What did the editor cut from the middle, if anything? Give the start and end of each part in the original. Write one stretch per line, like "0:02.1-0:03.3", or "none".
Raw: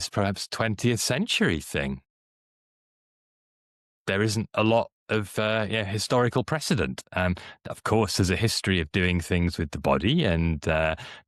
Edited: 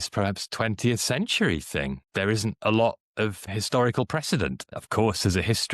0:02.0-0:04.0
0:05.3-0:05.8
0:07.0-0:07.6